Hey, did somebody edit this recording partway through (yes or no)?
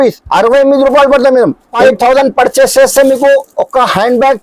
yes